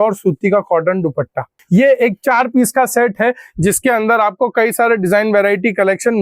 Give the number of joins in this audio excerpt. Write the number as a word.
one